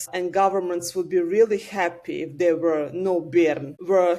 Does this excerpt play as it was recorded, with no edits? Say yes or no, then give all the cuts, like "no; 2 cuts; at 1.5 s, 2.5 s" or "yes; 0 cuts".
yes; 0 cuts